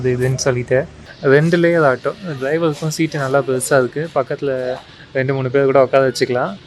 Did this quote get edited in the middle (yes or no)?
yes